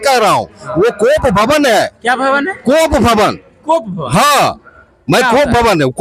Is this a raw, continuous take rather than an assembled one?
yes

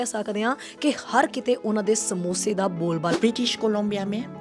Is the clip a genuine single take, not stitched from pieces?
no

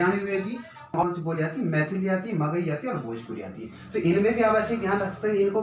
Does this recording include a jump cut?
yes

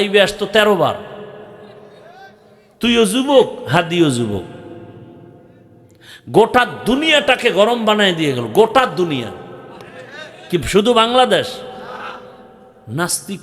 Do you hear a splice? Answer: yes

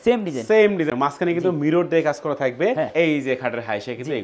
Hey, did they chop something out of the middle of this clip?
yes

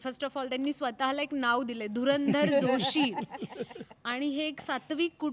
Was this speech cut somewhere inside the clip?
no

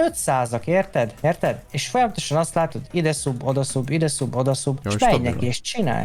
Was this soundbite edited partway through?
yes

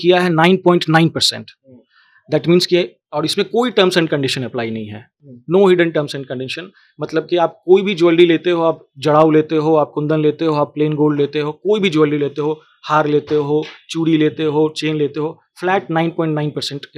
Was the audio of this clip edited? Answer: no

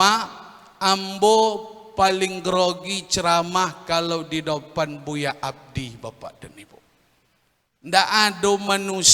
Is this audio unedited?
yes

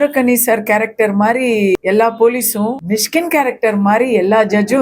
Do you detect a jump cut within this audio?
yes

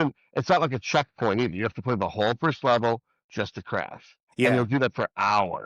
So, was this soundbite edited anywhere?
yes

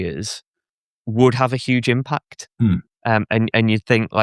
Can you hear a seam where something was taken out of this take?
no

